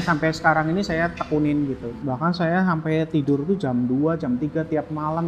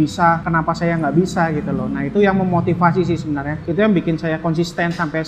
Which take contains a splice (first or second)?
first